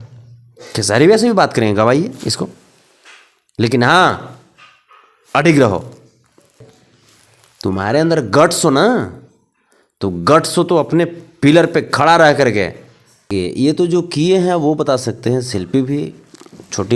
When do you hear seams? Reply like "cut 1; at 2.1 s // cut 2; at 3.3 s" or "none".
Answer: cut 1; at 6.6 s // cut 2; at 13.3 s